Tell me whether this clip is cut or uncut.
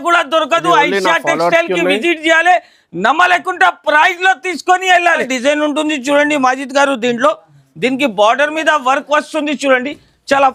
uncut